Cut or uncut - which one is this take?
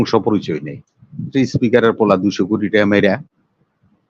cut